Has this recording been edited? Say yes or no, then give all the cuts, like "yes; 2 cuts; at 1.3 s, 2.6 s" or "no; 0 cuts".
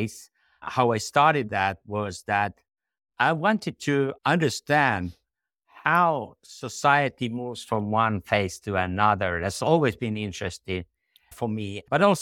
no; 0 cuts